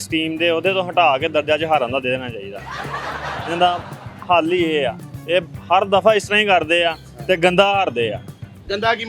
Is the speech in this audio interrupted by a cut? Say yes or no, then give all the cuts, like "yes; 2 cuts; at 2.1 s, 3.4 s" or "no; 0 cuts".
no; 0 cuts